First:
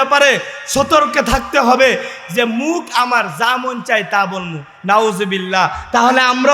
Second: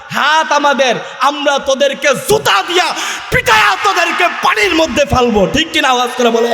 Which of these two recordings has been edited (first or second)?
first